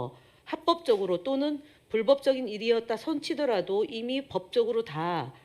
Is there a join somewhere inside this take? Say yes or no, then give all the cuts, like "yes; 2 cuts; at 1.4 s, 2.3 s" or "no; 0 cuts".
no; 0 cuts